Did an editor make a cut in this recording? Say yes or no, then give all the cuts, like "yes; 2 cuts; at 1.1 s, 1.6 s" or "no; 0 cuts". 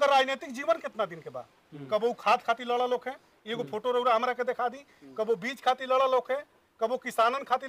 no; 0 cuts